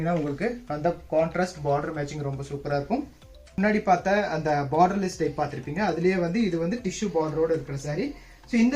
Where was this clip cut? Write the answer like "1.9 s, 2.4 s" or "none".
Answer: 3.6 s